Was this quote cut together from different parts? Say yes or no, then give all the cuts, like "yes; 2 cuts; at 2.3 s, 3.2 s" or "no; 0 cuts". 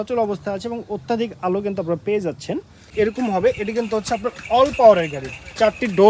yes; 1 cut; at 2.9 s